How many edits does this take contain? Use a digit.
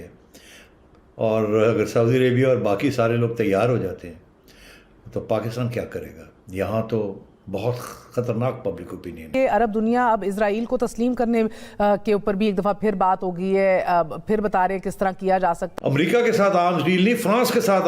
2